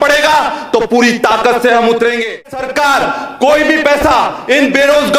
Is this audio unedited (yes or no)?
no